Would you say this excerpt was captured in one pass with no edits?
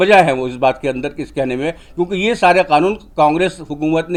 yes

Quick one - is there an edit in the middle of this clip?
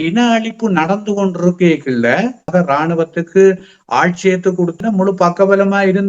yes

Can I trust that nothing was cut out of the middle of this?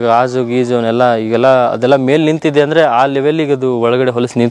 yes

